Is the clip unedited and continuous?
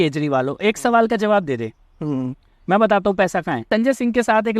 no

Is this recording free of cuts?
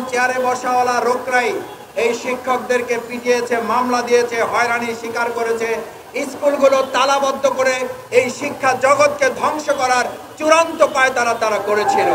yes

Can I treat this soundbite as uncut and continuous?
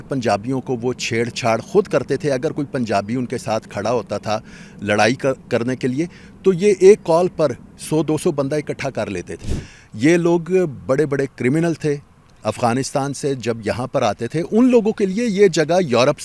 no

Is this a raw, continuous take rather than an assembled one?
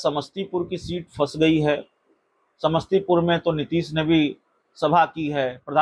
yes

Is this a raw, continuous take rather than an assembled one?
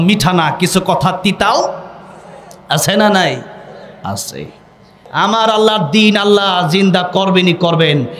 no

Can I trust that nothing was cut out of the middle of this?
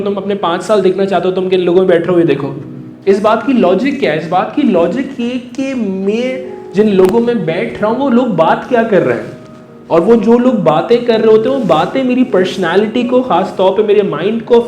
yes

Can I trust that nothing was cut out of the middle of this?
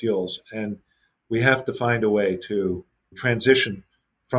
no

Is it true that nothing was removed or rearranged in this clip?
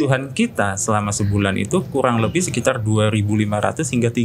yes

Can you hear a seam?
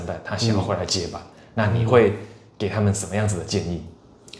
no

